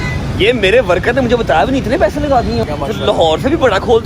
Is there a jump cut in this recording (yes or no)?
yes